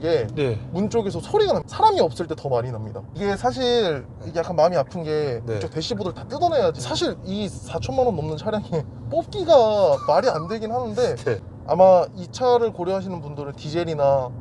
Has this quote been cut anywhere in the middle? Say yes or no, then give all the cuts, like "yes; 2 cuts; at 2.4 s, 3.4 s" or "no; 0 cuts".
yes; 4 cuts; at 1.7 s, 3.1 s, 6.9 s, 11.5 s